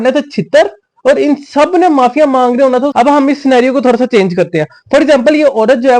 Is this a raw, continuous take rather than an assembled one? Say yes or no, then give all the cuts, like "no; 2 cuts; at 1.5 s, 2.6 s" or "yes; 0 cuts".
no; 1 cut; at 2.9 s